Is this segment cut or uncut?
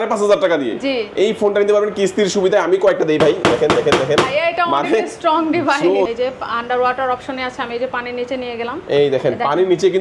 cut